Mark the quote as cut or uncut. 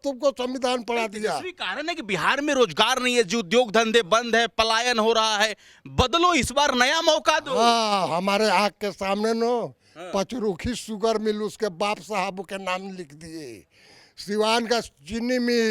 uncut